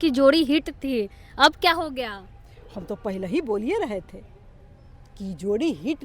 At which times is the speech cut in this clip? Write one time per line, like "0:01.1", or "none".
none